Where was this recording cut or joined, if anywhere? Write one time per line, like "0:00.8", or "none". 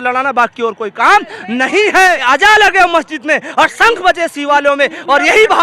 0:02.2